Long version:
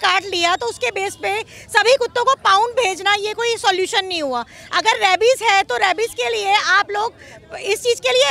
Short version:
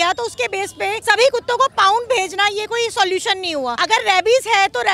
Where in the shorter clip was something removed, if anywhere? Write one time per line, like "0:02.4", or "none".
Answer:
0:01.0
0:03.8